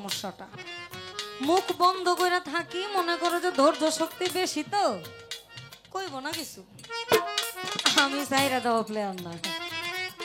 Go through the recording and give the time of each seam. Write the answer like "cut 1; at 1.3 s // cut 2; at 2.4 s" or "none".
none